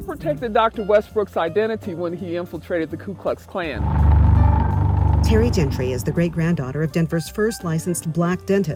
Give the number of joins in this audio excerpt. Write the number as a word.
zero